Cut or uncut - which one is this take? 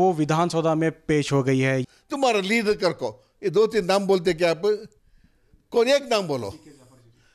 cut